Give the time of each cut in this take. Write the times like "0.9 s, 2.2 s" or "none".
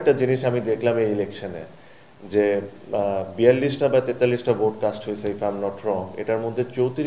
none